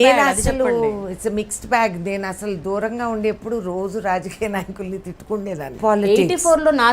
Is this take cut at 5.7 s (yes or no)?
yes